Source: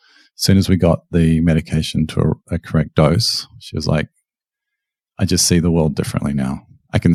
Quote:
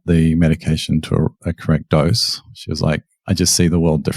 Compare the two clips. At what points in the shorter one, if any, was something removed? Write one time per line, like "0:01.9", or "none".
0:03.1